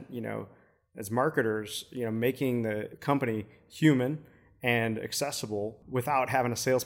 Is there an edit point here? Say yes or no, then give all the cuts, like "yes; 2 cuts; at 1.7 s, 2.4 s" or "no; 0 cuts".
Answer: yes; 2 cuts; at 2.9 s, 5.8 s